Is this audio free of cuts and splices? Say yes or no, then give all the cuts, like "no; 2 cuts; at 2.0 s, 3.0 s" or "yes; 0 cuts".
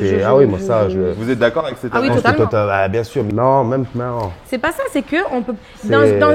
no; 1 cut; at 3.3 s